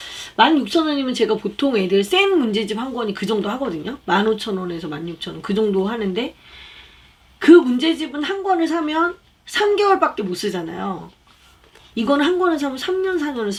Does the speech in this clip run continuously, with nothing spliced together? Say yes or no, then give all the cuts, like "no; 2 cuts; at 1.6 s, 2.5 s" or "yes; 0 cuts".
yes; 0 cuts